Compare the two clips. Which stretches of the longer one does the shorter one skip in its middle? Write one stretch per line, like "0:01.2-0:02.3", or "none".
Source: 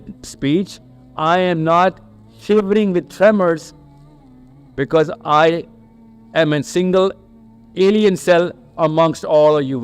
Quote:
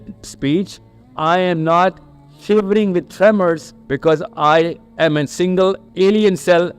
0:03.7-0:04.6
0:05.7-0:06.2
0:07.2-0:07.6